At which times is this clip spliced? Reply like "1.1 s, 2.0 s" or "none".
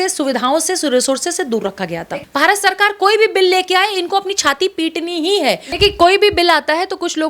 2.2 s, 5.7 s